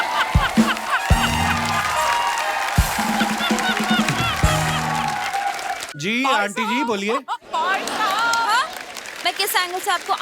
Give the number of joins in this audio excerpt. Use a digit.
1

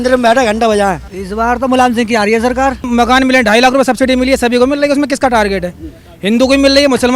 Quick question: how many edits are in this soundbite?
2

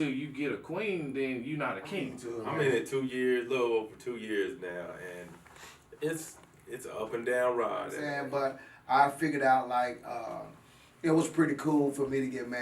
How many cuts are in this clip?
2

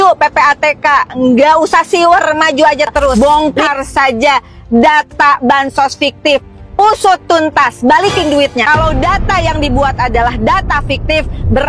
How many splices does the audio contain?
2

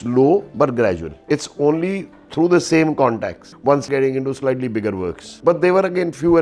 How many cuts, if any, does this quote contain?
0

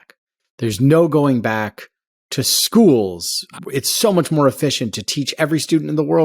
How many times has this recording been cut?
1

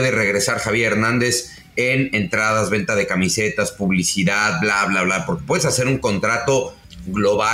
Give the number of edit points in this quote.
0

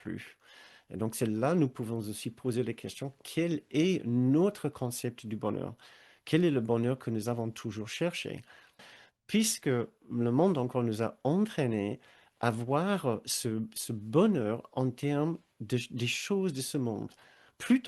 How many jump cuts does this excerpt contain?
1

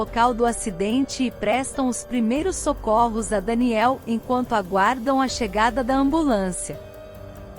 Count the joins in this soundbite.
1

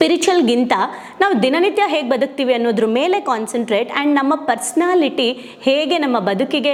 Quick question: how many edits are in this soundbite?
0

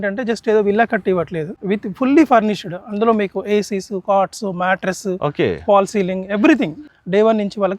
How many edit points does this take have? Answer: 2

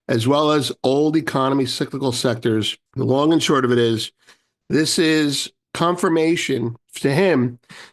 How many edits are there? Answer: 1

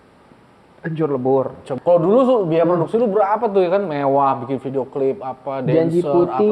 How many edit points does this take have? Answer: 1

